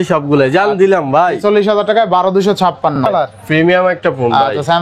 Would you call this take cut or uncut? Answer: cut